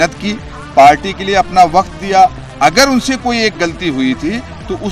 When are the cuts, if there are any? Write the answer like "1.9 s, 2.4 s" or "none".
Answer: 2.4 s

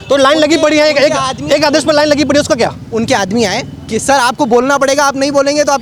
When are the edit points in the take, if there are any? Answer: none

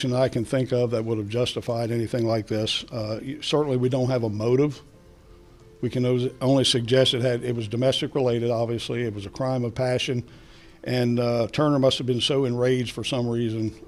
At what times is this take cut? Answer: none

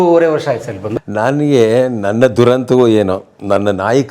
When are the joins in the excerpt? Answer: 1.0 s

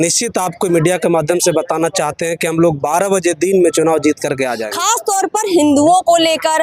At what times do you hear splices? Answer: 4.6 s

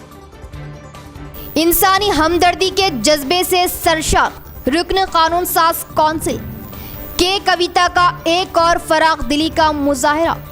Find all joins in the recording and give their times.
1.0 s

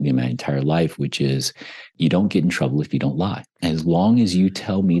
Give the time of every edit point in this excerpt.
1.9 s, 3.5 s

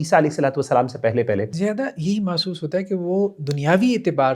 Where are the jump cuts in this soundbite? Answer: 1.5 s

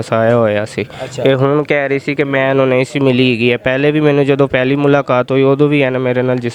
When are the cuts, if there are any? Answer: none

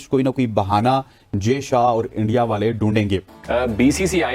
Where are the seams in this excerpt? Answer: 3.3 s

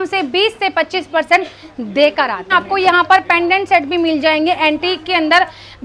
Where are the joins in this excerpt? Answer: none

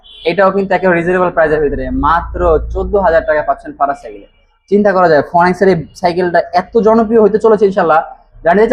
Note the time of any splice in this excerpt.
none

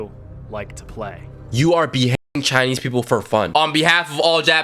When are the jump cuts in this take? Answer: 3.5 s

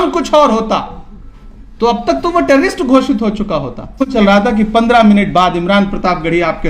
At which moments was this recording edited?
4.1 s

